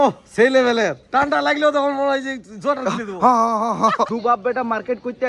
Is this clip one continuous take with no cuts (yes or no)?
no